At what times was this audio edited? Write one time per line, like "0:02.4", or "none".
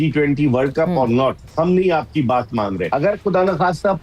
0:02.8